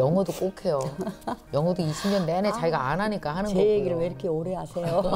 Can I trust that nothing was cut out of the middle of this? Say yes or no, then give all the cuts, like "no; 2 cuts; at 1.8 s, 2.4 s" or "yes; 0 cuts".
no; 1 cut; at 1.4 s